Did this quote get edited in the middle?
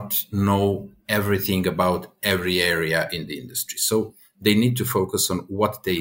no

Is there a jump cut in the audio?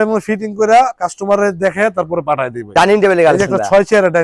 yes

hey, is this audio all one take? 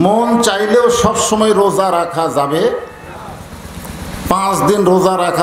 yes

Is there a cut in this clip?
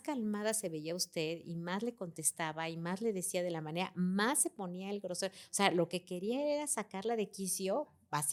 no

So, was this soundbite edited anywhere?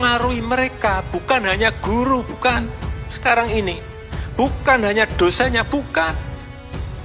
no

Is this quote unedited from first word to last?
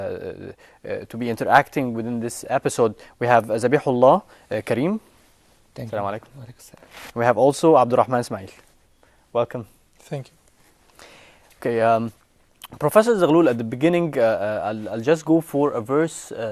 no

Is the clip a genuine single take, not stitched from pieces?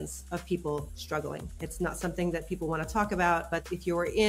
yes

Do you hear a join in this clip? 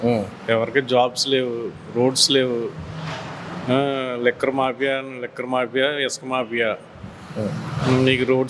no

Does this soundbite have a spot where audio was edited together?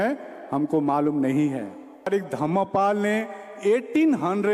yes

